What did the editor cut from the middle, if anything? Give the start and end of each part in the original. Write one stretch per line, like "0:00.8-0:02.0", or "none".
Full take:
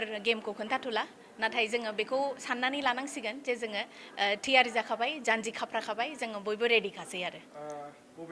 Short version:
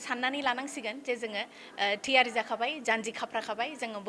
none